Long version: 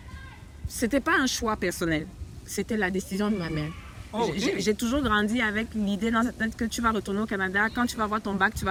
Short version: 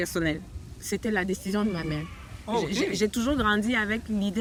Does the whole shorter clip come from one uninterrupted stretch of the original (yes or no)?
yes